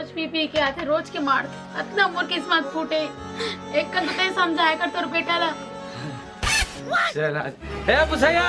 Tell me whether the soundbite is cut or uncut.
cut